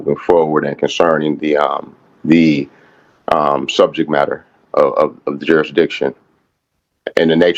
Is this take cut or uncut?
uncut